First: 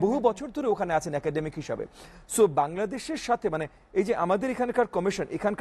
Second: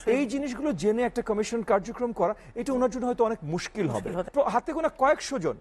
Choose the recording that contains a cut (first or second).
second